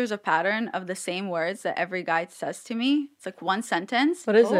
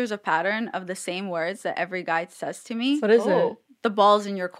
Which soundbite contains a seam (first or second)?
second